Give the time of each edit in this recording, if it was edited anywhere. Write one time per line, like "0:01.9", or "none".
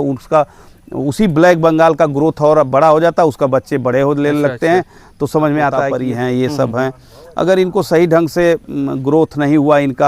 0:05.9